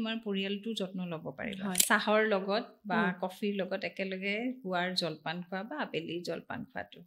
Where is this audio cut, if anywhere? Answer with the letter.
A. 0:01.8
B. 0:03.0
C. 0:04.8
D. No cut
A